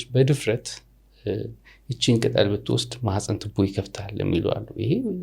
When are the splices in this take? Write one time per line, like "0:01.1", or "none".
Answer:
none